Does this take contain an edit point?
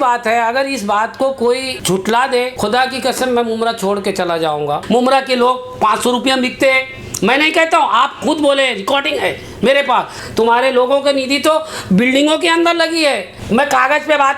yes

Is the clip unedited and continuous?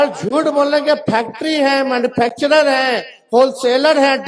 yes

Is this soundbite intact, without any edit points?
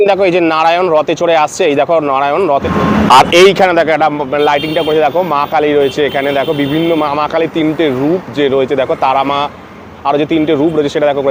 yes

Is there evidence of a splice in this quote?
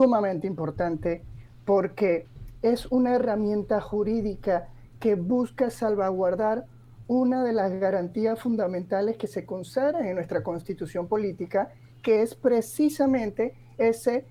no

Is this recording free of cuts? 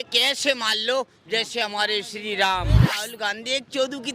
no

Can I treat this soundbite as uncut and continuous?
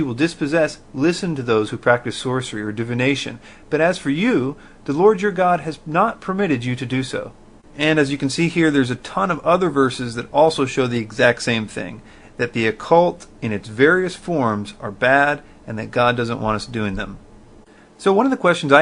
yes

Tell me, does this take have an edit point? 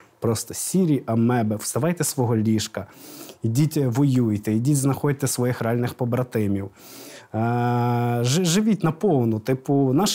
no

